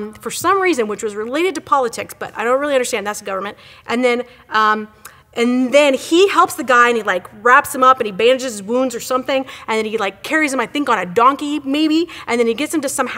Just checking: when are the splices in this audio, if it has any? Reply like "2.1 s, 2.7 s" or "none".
12.1 s